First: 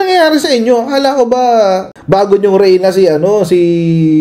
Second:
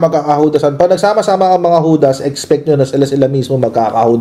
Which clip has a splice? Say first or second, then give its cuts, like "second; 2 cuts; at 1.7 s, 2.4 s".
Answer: first; 1 cut; at 1.9 s